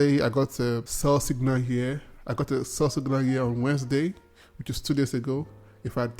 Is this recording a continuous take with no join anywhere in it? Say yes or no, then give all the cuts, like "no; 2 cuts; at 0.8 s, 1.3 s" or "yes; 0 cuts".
no; 1 cut; at 0.9 s